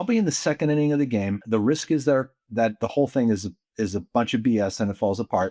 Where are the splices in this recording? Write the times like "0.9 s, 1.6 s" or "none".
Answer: 1.4 s